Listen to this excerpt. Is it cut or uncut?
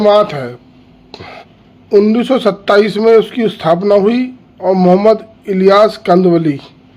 cut